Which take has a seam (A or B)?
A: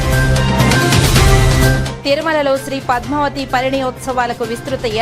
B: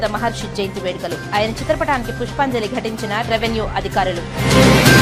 A